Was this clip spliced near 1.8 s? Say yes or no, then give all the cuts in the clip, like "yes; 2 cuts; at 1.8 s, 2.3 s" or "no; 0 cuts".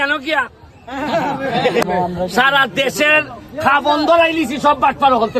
yes; 1 cut; at 1.8 s